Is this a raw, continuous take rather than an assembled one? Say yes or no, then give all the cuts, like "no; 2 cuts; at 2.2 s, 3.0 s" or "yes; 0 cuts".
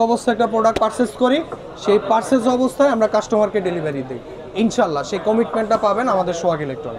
yes; 0 cuts